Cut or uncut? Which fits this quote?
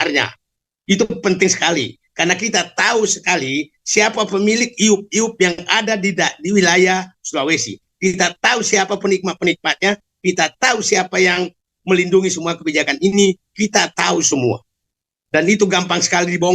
uncut